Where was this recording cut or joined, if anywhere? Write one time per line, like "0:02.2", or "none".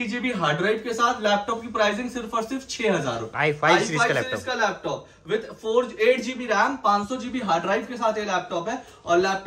0:03.3